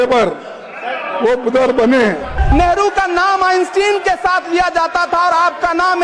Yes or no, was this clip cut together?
yes